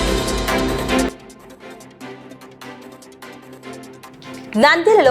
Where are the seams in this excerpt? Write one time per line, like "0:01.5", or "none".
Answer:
0:01.1
0:04.1